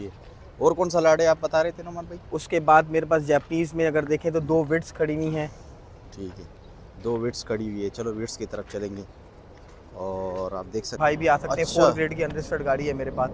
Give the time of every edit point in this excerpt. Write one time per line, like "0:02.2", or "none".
0:11.0